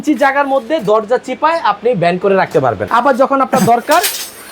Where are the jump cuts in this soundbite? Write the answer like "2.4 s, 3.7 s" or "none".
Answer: 2.8 s